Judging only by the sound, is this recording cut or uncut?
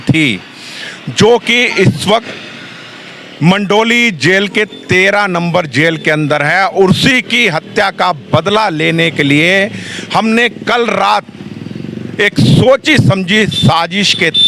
uncut